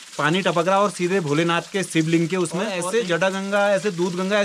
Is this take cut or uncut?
cut